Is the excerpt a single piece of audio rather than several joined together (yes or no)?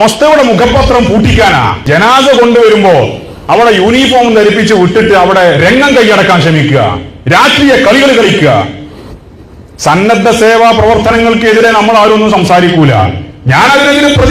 no